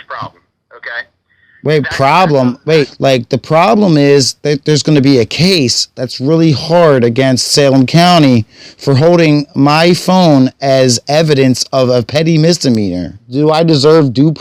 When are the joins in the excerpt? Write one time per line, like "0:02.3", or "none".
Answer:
0:02.9
0:09.5
0:13.3